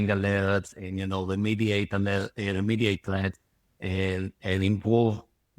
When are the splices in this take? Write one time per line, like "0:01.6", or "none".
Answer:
none